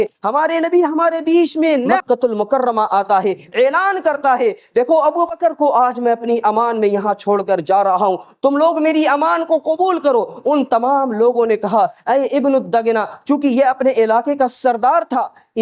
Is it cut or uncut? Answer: cut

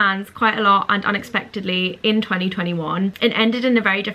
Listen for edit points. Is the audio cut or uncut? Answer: cut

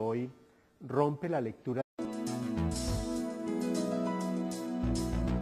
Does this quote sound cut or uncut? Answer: uncut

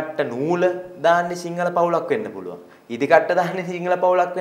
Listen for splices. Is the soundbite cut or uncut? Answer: uncut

